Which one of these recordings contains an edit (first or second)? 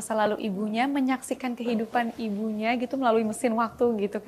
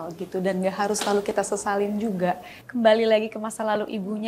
second